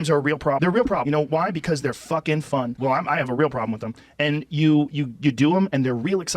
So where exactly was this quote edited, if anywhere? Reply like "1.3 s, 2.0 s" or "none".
0.9 s